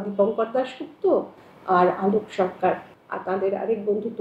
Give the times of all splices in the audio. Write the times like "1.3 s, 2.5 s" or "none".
2.9 s